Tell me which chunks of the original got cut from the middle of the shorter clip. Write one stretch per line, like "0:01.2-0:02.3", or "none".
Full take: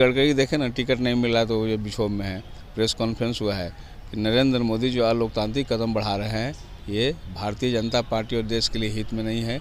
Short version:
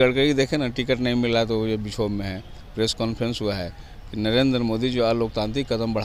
none